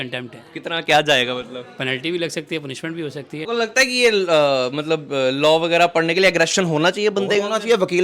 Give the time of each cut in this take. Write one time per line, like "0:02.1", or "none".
0:03.4